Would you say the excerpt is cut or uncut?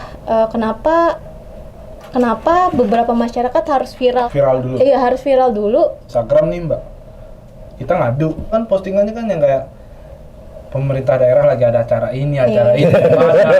cut